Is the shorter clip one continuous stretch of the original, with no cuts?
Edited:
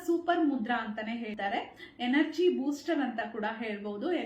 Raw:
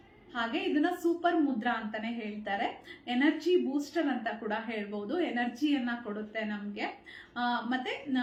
no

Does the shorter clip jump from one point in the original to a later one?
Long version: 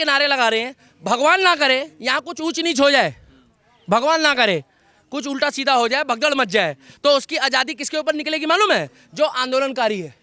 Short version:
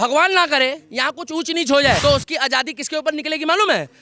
yes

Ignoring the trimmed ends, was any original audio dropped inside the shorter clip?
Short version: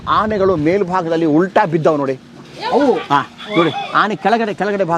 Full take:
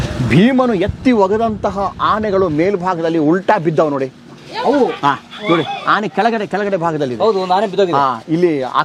no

